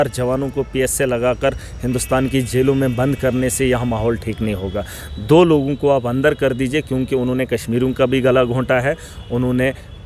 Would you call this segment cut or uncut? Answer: uncut